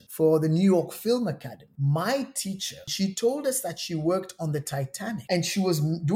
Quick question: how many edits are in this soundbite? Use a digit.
3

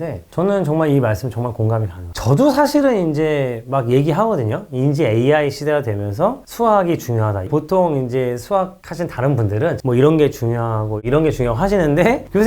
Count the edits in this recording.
3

